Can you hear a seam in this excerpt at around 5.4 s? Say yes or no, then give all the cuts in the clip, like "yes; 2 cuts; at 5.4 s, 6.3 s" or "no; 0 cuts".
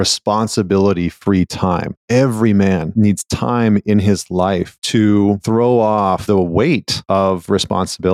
yes; 6 cuts; at 1.9 s, 2.9 s, 4.8 s, 5.4 s, 6.2 s, 6.9 s